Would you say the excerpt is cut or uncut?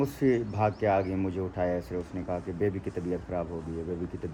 uncut